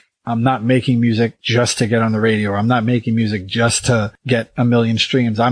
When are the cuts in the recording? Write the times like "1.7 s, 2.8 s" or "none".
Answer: 1.4 s, 4.2 s

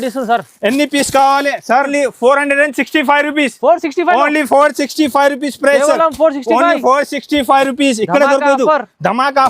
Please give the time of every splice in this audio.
1.9 s

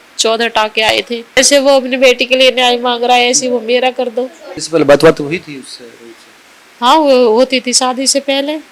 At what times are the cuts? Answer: 1.4 s, 4.5 s

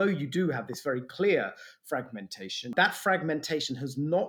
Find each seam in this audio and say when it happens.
2.7 s

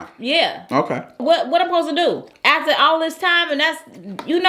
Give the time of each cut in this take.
1.2 s, 2.3 s

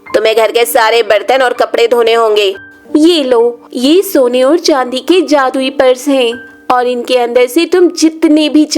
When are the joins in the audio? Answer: 2.7 s

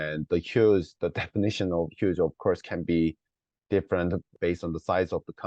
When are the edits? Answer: 0.9 s, 4.3 s

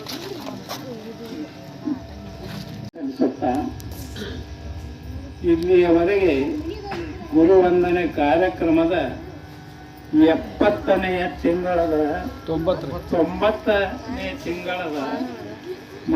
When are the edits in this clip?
2.9 s

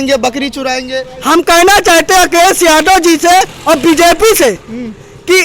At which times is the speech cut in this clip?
none

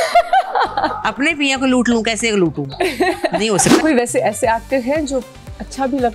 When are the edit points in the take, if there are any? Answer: 3.8 s

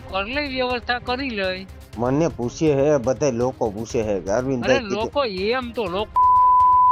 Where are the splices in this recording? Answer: none

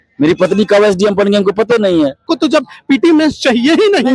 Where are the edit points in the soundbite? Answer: 2.2 s

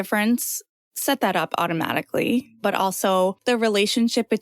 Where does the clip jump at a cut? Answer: 3.4 s

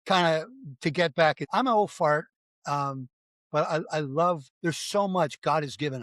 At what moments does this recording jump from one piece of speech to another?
1.4 s, 4.5 s

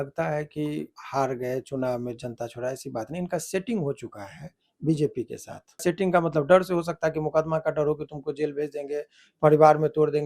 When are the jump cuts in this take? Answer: 0.9 s, 5.8 s

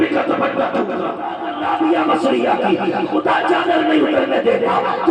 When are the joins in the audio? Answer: 1.4 s

